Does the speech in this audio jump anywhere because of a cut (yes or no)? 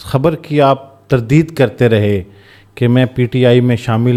no